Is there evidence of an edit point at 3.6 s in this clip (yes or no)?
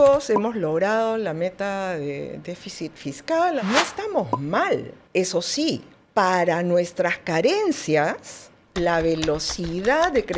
yes